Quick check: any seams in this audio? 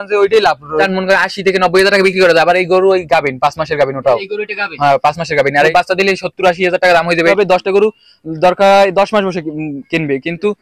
yes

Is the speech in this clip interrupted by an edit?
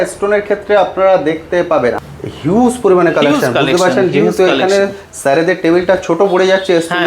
yes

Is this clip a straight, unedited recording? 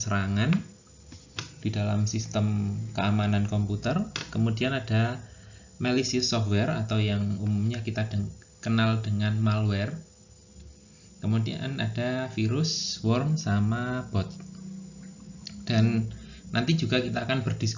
yes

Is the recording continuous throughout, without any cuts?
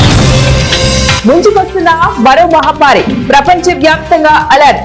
yes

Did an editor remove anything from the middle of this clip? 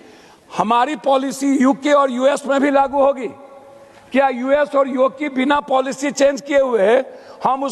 no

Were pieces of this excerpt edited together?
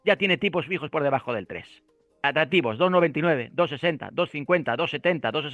no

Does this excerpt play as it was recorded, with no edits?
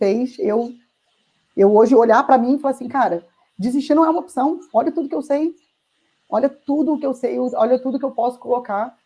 yes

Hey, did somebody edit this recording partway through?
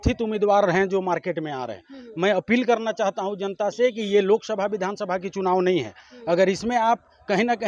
no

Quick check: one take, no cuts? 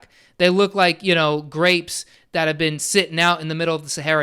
yes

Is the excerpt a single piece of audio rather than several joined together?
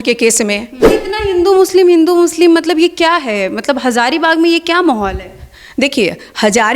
no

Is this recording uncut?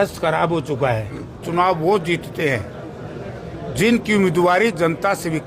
no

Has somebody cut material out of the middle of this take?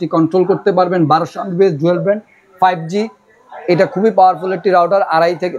no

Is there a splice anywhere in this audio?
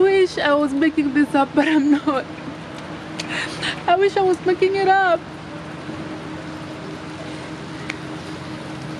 no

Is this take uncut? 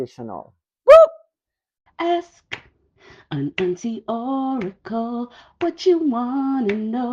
no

